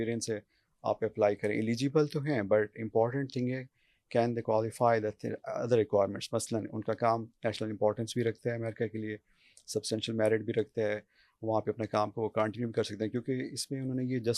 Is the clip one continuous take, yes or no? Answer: yes